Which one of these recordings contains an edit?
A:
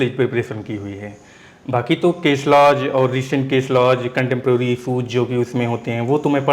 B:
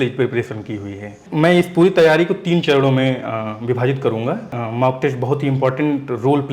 B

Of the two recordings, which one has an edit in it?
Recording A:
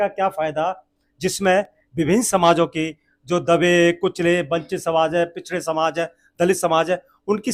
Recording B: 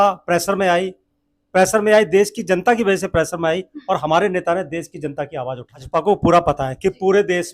B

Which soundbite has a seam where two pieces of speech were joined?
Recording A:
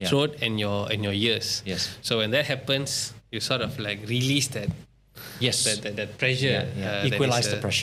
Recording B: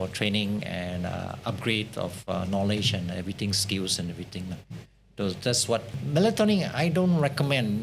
B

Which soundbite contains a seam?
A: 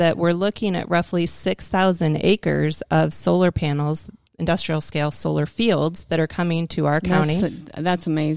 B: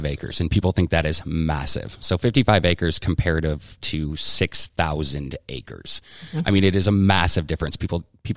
A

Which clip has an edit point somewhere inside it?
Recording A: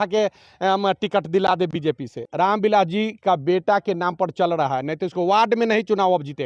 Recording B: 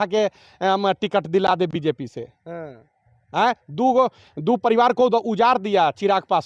A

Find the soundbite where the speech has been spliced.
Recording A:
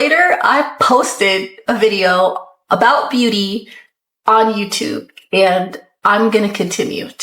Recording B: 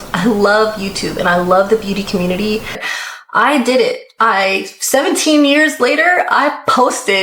B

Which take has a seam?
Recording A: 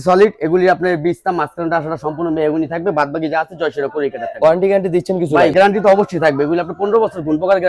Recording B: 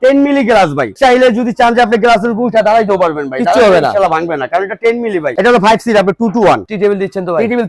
B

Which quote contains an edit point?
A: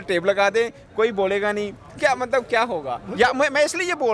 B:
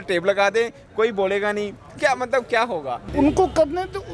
B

